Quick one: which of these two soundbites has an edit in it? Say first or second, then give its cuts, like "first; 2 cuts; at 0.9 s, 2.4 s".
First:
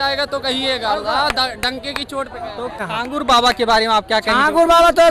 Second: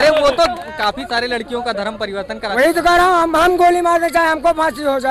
first; 1 cut; at 2.8 s